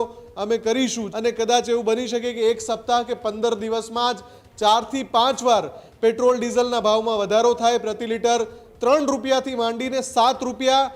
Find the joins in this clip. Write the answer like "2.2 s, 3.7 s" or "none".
1.0 s